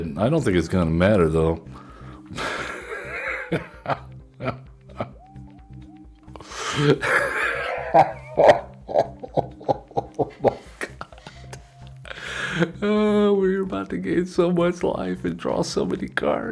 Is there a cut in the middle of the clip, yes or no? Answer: no